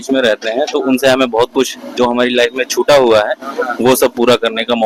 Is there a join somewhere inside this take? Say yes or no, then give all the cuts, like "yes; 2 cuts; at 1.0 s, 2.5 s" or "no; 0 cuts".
no; 0 cuts